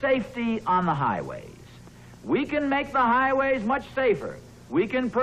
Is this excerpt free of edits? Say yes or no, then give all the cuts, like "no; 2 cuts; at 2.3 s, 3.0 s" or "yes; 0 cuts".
yes; 0 cuts